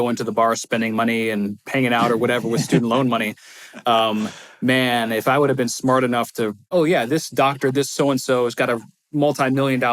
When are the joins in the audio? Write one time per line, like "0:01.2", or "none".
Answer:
0:06.7